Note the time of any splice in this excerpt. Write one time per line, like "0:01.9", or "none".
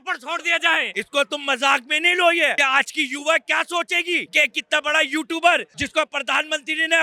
0:01.0
0:02.6
0:04.3
0:05.8